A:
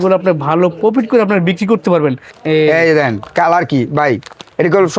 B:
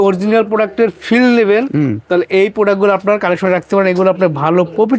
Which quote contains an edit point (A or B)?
A